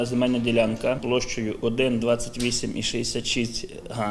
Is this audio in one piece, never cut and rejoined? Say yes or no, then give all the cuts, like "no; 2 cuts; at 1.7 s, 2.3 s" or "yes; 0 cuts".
no; 1 cut; at 1.0 s